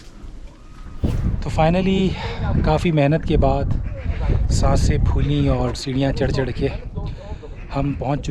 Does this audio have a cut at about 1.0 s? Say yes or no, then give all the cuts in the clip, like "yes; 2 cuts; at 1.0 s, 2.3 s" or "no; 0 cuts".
yes; 1 cut; at 1.0 s